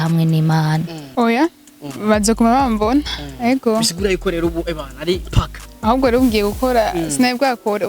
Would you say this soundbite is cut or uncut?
cut